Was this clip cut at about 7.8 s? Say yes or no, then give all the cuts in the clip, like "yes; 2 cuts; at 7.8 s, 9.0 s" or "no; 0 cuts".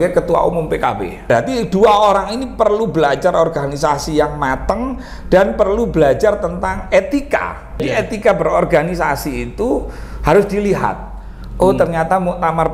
yes; 2 cuts; at 1.2 s, 7.8 s